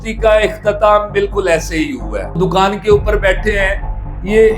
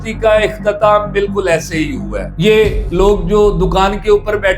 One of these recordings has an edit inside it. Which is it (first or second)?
first